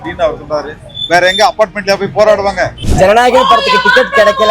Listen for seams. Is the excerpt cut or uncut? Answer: cut